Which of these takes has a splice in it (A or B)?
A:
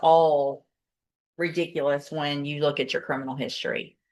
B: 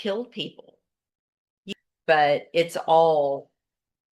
B